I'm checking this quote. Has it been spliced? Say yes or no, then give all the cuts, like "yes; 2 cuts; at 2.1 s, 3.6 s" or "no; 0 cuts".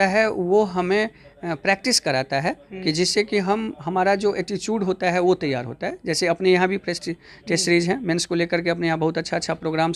no; 0 cuts